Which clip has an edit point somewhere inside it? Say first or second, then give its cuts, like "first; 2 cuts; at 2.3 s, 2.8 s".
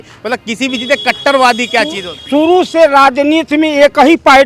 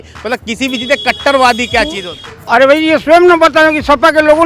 second; 1 cut; at 2.1 s